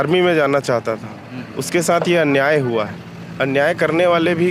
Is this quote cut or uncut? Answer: uncut